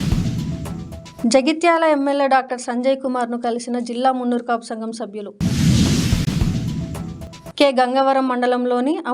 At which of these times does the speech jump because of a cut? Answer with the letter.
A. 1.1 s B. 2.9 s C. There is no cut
A